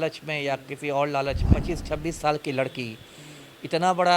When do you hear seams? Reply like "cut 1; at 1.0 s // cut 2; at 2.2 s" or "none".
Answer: cut 1; at 1.5 s